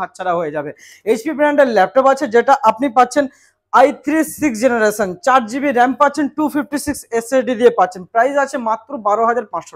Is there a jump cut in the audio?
no; 0 cuts

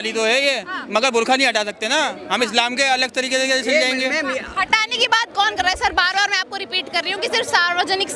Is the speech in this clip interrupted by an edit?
no; 0 cuts

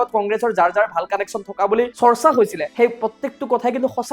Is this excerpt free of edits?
no; 2 cuts; at 1.9 s, 2.6 s

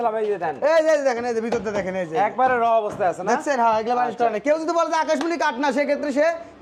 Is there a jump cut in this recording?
no; 0 cuts

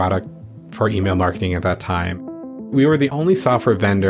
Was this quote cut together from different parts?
no; 0 cuts

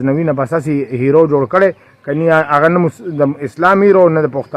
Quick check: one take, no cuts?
yes; 0 cuts

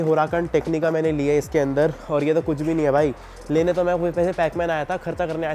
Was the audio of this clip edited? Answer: no; 0 cuts

